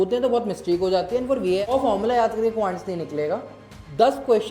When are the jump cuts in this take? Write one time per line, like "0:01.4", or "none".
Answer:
0:01.7

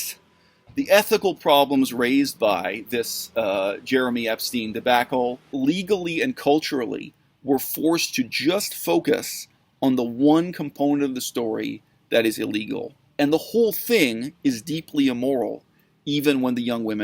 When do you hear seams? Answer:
0:05.5
0:13.0

